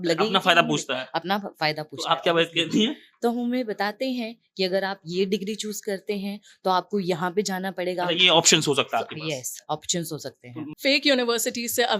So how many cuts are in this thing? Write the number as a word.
one